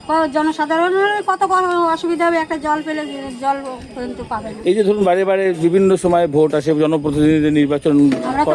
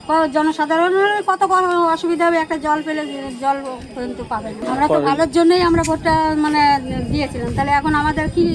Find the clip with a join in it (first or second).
second